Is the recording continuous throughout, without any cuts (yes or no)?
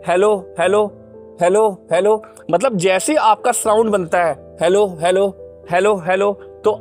yes